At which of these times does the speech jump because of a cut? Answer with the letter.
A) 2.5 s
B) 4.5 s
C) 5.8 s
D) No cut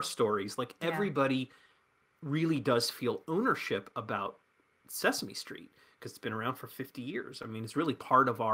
D